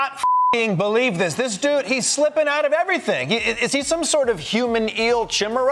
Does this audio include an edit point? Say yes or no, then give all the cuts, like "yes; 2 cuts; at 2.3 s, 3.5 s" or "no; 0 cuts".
no; 0 cuts